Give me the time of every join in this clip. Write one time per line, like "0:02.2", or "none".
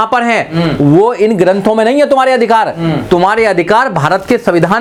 none